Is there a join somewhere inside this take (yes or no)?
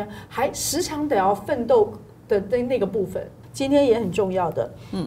yes